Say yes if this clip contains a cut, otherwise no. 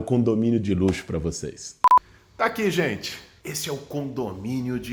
no